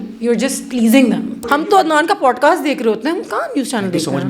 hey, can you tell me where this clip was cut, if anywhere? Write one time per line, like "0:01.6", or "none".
0:01.5